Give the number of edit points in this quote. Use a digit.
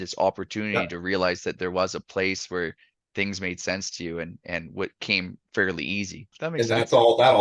1